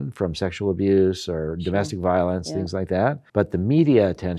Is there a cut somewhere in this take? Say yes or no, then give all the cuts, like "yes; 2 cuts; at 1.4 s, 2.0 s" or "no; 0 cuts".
yes; 1 cut; at 3.2 s